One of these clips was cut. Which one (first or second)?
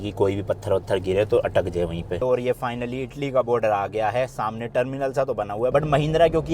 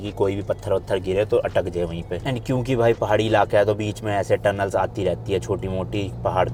first